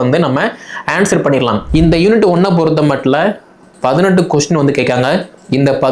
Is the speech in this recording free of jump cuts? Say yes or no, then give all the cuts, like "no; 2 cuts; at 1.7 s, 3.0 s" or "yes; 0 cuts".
no; 1 cut; at 1.6 s